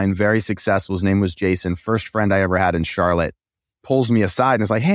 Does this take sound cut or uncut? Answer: uncut